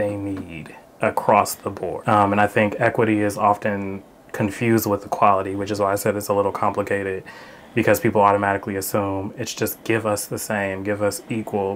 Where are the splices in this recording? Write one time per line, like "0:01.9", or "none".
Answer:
0:02.0